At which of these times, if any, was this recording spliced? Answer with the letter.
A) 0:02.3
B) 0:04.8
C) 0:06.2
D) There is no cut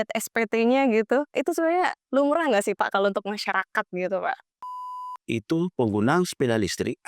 B